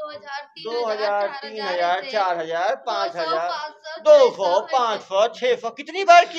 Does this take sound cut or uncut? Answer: uncut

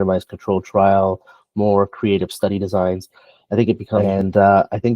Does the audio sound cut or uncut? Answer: cut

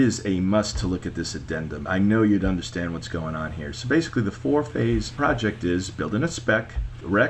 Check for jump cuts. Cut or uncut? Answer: uncut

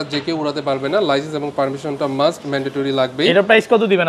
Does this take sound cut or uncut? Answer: uncut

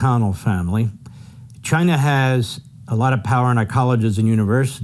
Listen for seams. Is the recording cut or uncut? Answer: uncut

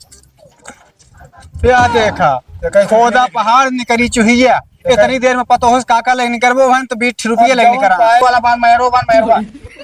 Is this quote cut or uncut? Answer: cut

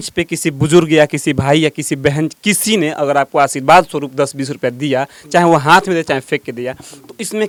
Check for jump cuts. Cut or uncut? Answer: uncut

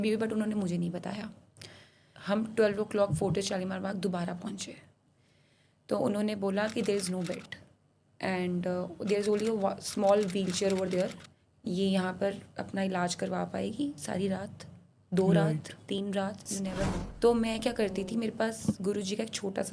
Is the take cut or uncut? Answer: cut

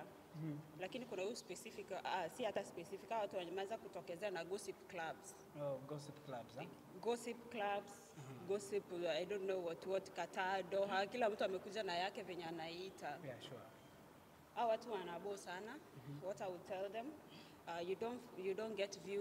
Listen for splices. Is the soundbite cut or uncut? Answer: uncut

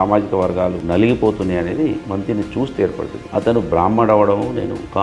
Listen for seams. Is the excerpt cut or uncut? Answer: cut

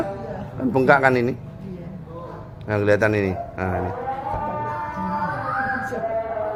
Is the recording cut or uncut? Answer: uncut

